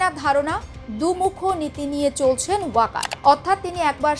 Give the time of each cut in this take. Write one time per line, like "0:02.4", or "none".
0:03.1